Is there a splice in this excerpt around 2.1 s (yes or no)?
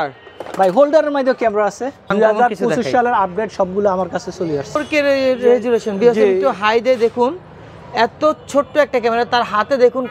yes